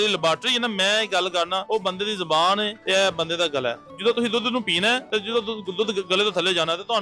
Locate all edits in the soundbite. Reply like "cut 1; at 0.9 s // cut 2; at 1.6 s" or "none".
cut 1; at 1.6 s // cut 2; at 2.8 s // cut 3; at 3.9 s // cut 4; at 5.0 s